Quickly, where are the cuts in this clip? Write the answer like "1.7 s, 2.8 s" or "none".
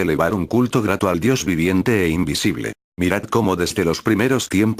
none